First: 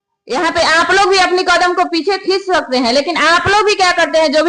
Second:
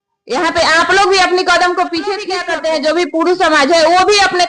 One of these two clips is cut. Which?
second; 1 cut; at 2.4 s

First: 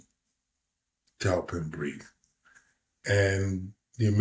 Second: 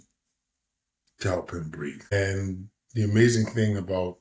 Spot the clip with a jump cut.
second; 1 cut; at 2.1 s

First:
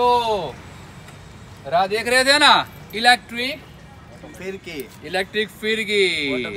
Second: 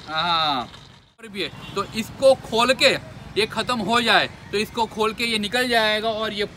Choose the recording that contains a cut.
second; 1 cut; at 1.3 s

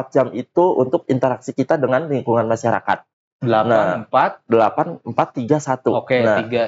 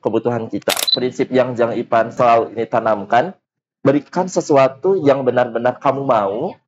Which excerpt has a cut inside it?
second; 2 cuts; at 0.9 s, 2.1 s

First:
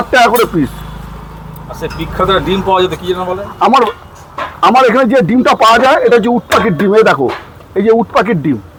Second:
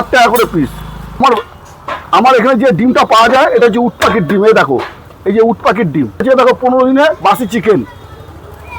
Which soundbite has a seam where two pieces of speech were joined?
second; 2 cuts; at 1.2 s, 6.2 s

